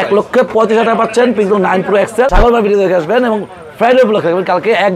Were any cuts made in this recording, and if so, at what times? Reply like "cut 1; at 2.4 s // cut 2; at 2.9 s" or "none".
cut 1; at 2.3 s